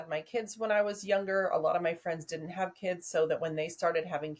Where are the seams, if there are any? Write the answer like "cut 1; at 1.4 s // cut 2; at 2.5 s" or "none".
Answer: none